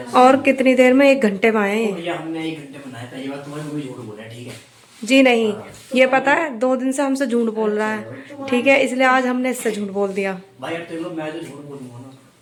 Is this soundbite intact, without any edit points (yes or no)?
yes